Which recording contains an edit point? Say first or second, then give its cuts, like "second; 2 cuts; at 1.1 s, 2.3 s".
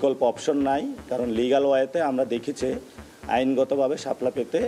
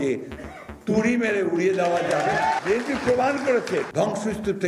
second; 2 cuts; at 2.6 s, 3.9 s